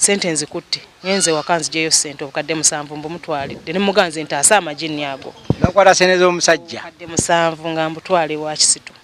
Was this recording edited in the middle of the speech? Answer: no; 0 cuts

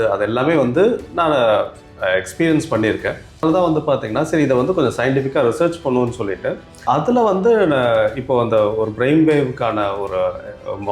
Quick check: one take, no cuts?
no; 2 cuts; at 3.4 s, 6.8 s

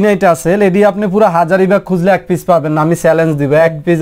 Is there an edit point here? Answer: no; 0 cuts

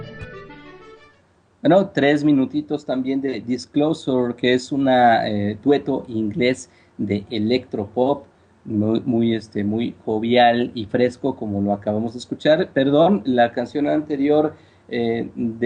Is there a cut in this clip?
no; 0 cuts

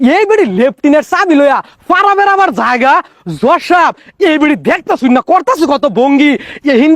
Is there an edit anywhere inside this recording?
no; 0 cuts

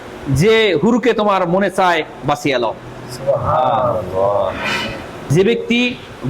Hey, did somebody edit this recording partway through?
yes; 1 cut; at 5.2 s

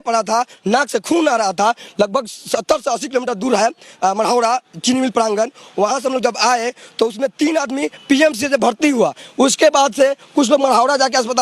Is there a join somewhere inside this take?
no; 0 cuts

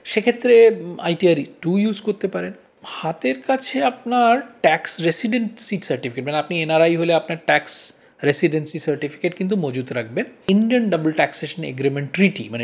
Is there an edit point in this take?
yes; 1 cut; at 10.4 s

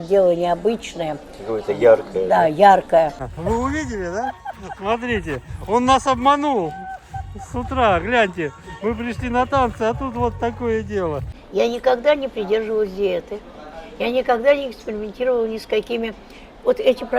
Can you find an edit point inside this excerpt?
yes; 2 cuts; at 3.3 s, 11.3 s

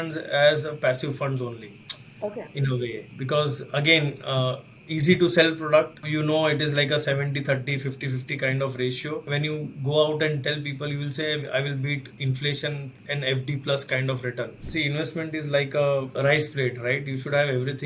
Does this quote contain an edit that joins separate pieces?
yes; 5 cuts; at 3.1 s, 6.1 s, 9.3 s, 14.6 s, 16.1 s

